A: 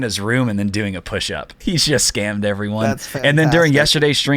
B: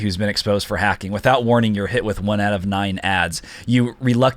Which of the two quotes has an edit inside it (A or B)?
A